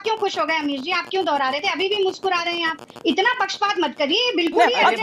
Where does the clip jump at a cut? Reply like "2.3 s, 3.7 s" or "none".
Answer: none

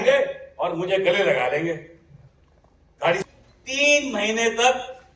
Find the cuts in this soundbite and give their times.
3.2 s

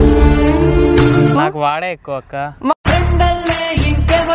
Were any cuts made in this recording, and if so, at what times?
1.3 s

